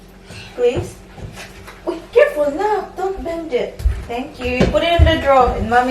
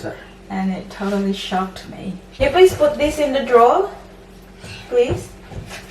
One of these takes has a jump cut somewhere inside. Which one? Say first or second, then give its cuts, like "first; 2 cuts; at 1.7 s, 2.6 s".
second; 1 cut; at 2.4 s